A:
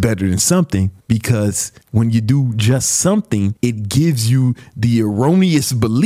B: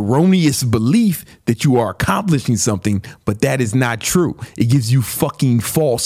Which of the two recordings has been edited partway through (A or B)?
A